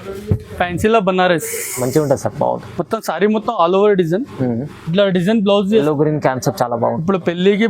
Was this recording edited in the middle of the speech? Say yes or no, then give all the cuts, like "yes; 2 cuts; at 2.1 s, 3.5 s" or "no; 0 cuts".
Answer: yes; 1 cut; at 5.8 s